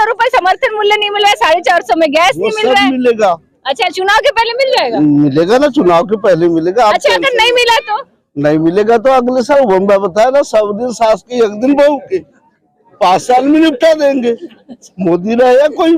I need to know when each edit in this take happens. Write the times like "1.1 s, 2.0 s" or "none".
none